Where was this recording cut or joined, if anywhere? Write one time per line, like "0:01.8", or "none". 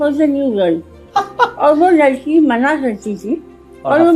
none